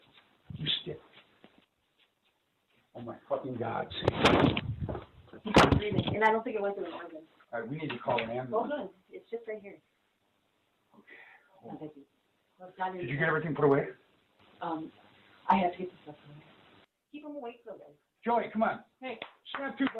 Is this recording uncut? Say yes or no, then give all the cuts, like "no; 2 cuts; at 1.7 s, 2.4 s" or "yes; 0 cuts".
yes; 0 cuts